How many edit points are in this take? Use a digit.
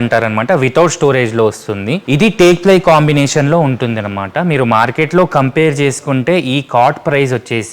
1